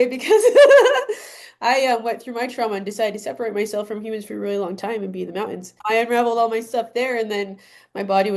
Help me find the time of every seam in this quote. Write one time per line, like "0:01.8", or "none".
0:05.7